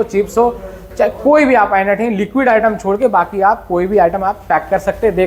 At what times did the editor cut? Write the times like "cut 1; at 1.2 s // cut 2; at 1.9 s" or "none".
none